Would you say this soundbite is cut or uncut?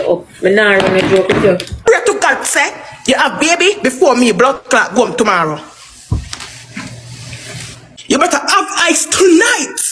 cut